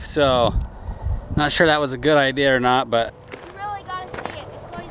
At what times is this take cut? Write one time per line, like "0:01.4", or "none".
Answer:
0:03.2